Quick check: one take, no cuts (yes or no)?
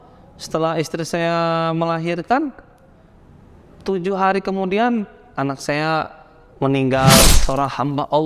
no